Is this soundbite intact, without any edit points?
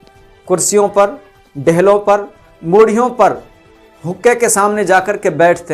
yes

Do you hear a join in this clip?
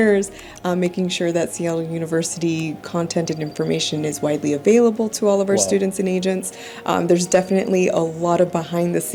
no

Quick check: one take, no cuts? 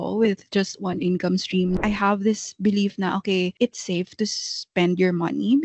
no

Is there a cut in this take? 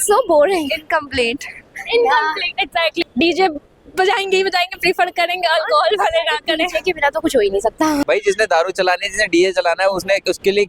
yes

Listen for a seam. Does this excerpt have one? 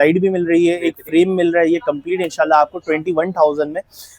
no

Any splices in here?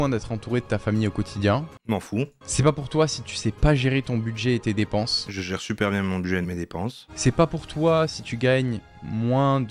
yes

